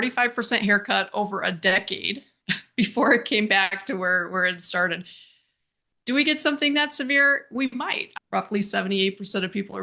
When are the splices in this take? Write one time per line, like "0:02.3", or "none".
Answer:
0:08.0